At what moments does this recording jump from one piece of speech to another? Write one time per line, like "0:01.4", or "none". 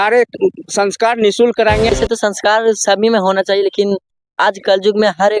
0:02.0